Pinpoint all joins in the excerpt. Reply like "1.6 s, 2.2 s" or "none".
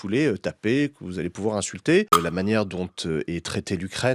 2.1 s